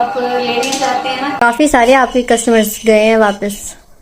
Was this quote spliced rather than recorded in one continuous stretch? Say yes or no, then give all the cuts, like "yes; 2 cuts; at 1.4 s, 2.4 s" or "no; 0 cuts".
yes; 1 cut; at 1.3 s